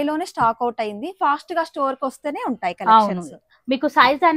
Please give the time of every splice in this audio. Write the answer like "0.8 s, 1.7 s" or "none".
none